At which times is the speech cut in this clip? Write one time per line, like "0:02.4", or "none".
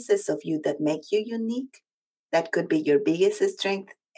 none